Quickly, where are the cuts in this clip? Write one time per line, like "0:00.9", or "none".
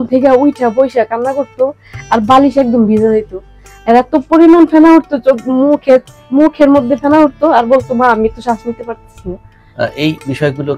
0:09.5

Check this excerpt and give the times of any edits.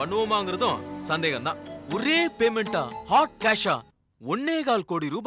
0:01.7

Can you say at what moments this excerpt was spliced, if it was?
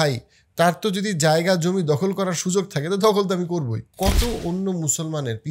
0:03.9

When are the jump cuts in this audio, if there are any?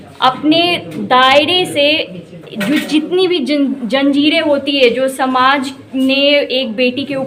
none

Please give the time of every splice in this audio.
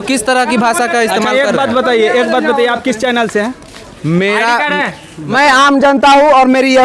0:05.3

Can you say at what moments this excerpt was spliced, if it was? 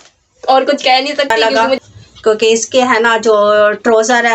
0:01.3

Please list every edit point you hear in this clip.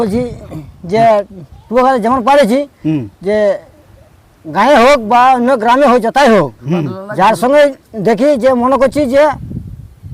none

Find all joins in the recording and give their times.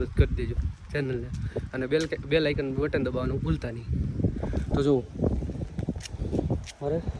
none

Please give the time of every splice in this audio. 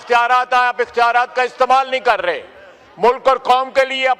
none

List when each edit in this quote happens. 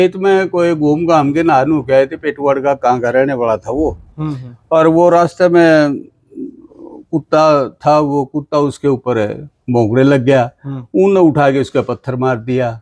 none

